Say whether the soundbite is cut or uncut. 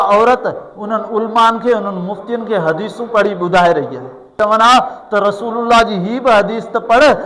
cut